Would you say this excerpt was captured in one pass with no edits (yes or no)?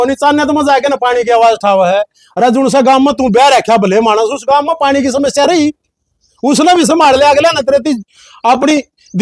yes